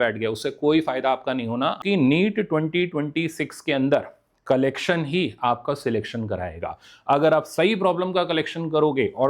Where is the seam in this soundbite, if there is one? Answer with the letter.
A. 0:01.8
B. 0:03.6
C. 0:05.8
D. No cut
A